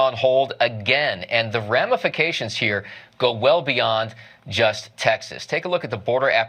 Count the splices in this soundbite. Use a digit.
1